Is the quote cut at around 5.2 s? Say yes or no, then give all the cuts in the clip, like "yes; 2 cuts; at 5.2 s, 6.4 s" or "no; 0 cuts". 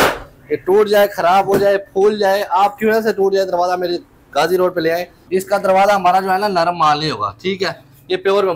yes; 1 cut; at 5.2 s